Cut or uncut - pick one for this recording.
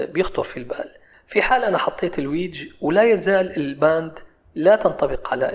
uncut